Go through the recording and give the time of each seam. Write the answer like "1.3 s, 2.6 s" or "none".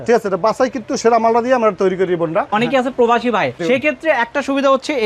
2.5 s, 3.6 s